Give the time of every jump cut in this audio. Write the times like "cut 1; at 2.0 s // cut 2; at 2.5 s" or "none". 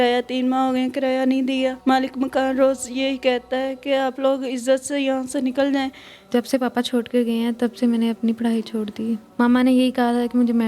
cut 1; at 1.8 s // cut 2; at 6.3 s // cut 3; at 9.3 s